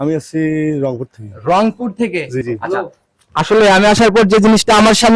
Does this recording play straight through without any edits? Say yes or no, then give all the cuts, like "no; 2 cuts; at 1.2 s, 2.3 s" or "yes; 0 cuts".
no; 1 cut; at 2.4 s